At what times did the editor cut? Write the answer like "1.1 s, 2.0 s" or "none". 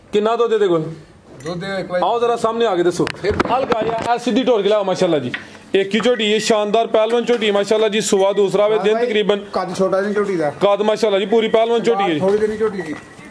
none